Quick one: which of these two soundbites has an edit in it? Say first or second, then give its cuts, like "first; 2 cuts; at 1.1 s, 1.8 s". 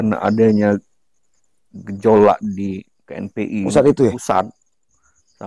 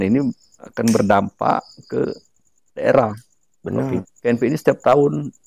second; 1 cut; at 4.1 s